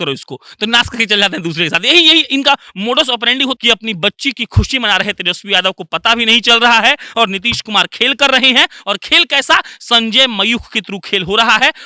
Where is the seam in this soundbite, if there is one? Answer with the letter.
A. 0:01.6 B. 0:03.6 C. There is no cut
B